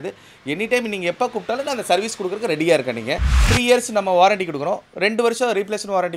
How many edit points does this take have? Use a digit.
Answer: 1